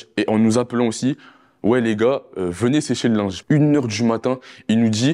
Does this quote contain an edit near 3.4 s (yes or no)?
yes